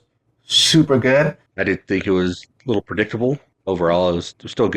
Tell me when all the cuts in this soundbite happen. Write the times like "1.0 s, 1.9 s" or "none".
1.5 s, 3.5 s